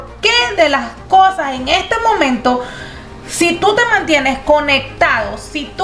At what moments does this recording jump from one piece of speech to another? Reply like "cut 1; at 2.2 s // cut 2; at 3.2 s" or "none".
none